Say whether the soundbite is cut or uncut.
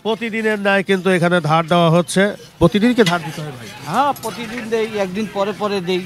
uncut